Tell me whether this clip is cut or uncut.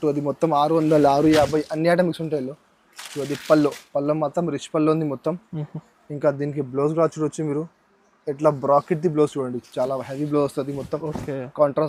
uncut